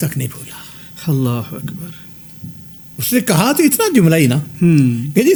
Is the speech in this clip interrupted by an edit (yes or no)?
no